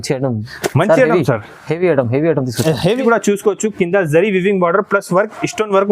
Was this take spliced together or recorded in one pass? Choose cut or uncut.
cut